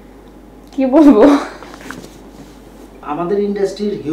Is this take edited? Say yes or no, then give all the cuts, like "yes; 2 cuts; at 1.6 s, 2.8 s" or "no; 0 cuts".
yes; 1 cut; at 3.0 s